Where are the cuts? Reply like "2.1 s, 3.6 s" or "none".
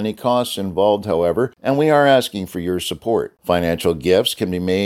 1.6 s